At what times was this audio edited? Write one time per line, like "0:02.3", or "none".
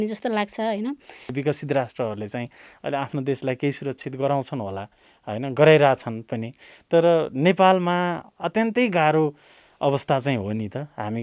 0:01.3